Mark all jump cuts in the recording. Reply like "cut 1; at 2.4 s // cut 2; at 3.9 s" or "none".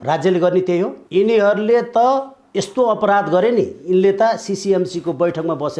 cut 1; at 1.0 s